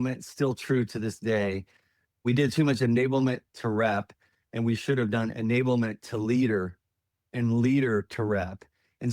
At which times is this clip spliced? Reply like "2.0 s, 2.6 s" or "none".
2.2 s